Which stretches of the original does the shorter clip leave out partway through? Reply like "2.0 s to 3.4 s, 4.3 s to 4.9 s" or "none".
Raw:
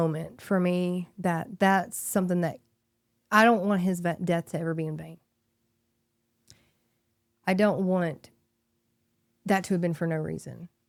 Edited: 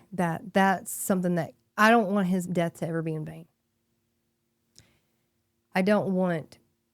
2.7 s to 3.1 s, 4.0 s to 4.2 s